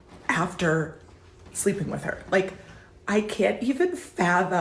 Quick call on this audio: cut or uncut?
cut